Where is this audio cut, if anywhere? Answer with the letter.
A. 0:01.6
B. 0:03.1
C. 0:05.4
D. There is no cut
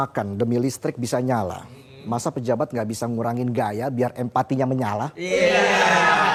D